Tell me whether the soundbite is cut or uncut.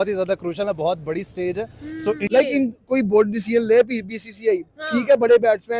cut